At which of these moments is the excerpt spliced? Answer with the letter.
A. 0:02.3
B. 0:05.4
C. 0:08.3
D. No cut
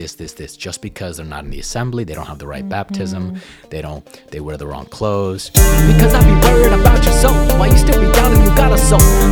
B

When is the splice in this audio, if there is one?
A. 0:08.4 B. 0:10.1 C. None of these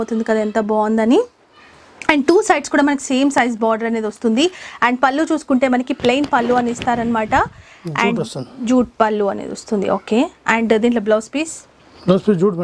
C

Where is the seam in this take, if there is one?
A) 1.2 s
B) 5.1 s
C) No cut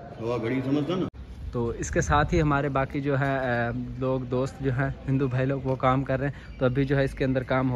A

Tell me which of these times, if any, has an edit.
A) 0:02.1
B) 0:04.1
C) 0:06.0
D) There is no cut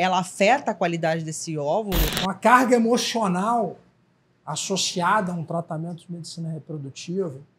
A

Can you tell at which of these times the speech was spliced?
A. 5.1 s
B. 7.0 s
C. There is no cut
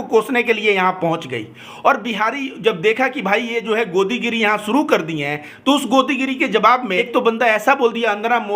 B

